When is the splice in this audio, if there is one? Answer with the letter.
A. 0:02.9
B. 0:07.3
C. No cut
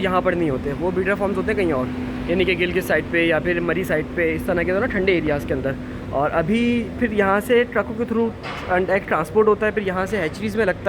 C